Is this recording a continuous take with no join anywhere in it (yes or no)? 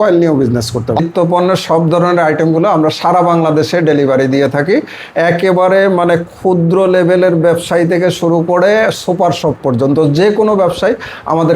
no